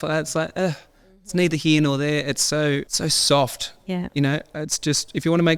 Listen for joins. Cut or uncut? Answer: cut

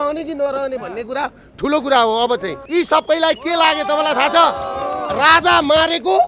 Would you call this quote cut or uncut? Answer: cut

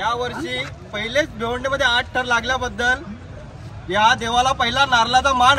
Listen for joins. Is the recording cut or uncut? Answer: uncut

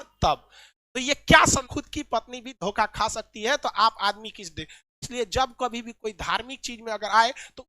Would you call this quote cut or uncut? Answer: cut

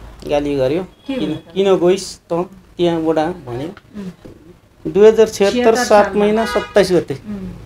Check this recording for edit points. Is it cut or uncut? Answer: cut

